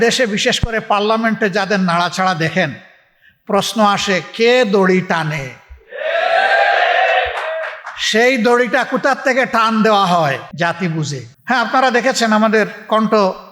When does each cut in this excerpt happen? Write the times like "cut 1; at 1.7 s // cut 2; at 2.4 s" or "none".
cut 1; at 10.5 s // cut 2; at 11.3 s